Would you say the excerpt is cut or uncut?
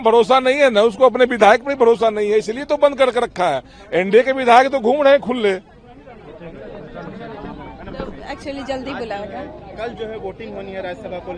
uncut